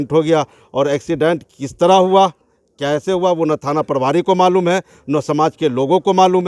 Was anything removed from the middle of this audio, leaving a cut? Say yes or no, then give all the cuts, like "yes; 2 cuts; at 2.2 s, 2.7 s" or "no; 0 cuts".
no; 0 cuts